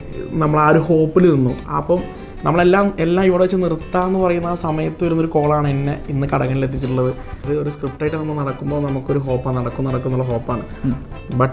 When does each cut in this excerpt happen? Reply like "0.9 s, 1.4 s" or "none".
7.3 s